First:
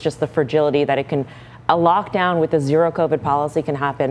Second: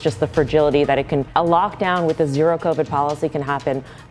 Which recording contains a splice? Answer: second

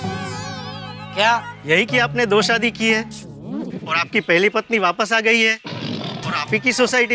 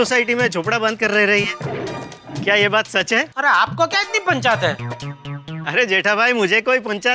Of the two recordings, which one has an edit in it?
second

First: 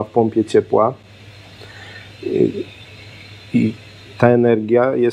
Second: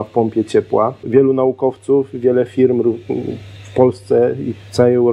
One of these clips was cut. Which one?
second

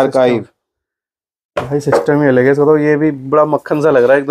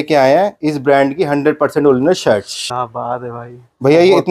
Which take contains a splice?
second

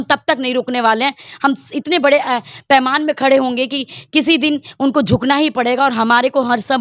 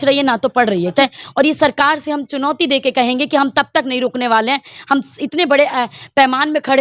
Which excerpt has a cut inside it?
second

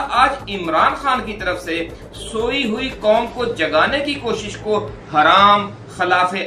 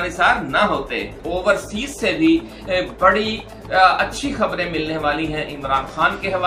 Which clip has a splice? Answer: second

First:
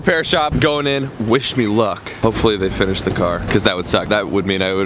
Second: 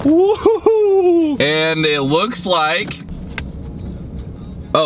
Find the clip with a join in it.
second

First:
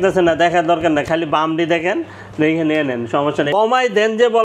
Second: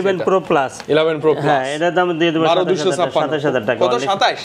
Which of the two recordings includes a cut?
first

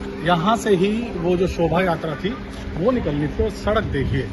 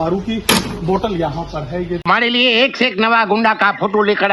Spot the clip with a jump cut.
second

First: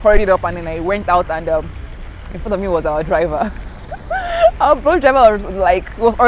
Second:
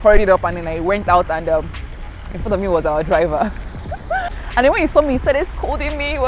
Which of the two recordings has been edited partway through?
second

